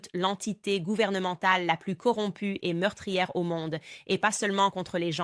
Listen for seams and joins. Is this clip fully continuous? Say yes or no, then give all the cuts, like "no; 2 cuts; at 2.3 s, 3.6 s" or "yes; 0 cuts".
yes; 0 cuts